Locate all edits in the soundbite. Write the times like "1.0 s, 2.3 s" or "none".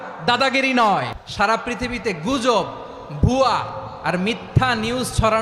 1.2 s